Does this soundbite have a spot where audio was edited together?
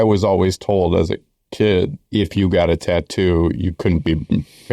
yes; 1 cut; at 2.0 s

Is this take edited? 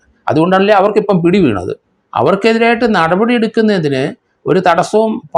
yes; 1 cut; at 1.9 s

